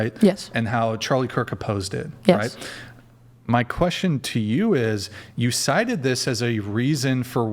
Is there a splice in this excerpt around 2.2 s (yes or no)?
no